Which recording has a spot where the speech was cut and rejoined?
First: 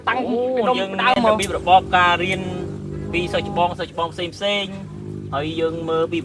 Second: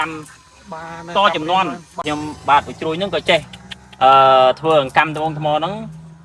second; 1 cut; at 1.9 s

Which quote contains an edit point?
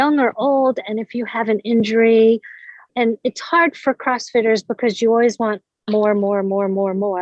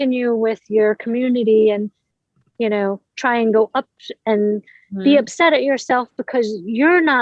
first; 1 cut; at 2.9 s

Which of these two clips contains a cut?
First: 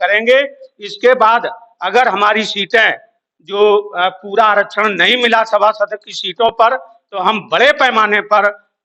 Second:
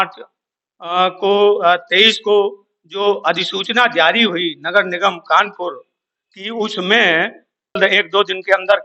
second; 1 cut; at 7.8 s

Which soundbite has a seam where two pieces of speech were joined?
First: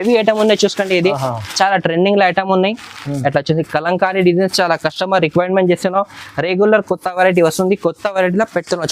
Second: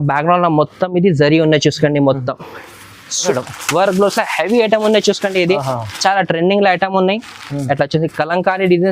second; 1 cut; at 3.3 s

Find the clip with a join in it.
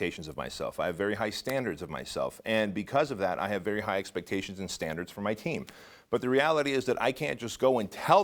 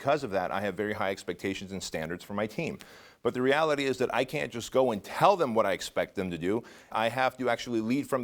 second; 1 cut; at 6.9 s

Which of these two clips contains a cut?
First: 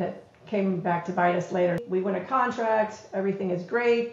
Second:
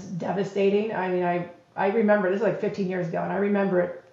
first; 1 cut; at 1.8 s

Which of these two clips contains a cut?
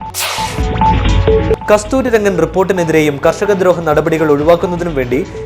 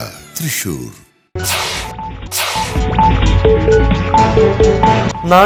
first; 1 cut; at 1.3 s

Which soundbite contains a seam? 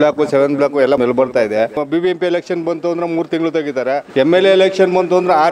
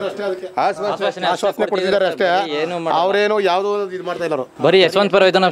first; 3 cuts; at 1.0 s, 1.7 s, 4.1 s

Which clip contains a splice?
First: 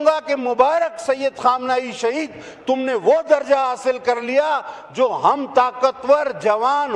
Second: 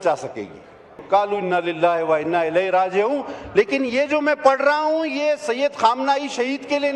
second; 1 cut; at 0.9 s

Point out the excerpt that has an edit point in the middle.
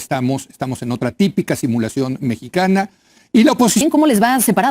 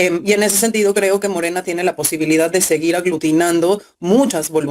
first; 1 cut; at 3.8 s

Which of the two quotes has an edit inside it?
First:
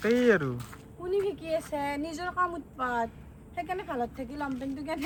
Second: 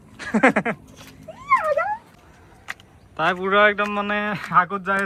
second; 1 cut; at 2.1 s

